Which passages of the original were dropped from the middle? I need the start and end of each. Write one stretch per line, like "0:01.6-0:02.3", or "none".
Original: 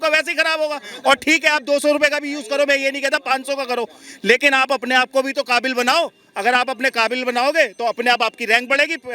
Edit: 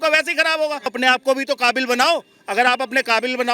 0:00.9-0:04.8